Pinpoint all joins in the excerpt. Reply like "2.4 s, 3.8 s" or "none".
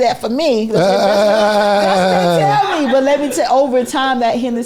none

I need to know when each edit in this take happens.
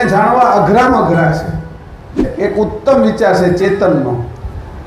2.2 s

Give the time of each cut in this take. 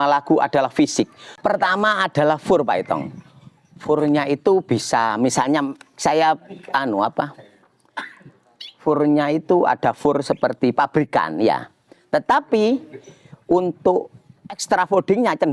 1.2 s

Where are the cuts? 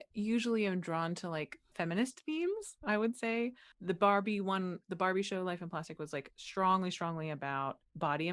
1.7 s, 3.7 s

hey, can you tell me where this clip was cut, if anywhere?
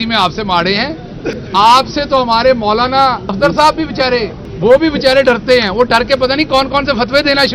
1.4 s, 3.3 s, 4.4 s

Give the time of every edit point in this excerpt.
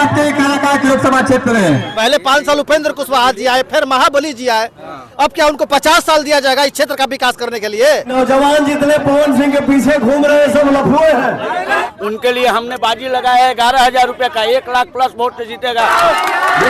1.9 s, 8.1 s, 11.9 s, 15.9 s

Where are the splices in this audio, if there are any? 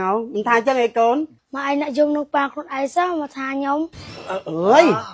4.2 s

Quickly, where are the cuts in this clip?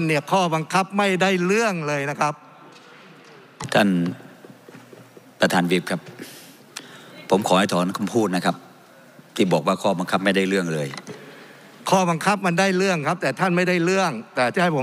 3.7 s

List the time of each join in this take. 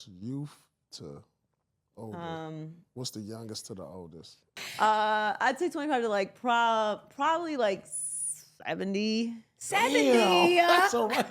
4.4 s

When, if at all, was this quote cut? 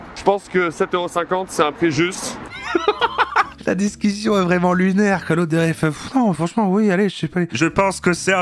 2.5 s, 7.5 s

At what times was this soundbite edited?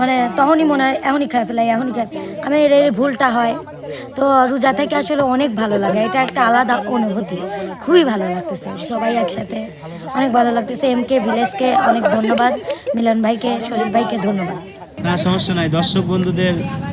14.9 s

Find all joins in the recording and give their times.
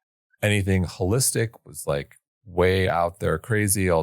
none

